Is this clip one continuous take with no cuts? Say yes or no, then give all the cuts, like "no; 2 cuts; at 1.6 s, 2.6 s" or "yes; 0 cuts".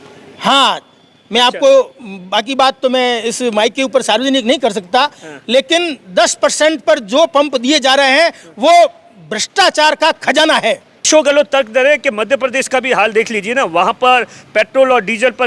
no; 1 cut; at 11.1 s